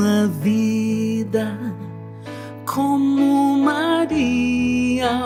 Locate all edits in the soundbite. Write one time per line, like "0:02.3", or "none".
none